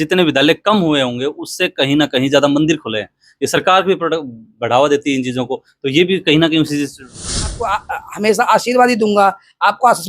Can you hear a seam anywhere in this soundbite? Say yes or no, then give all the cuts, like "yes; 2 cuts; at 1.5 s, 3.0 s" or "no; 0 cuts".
yes; 1 cut; at 7.6 s